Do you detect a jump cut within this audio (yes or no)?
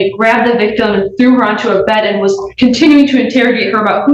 no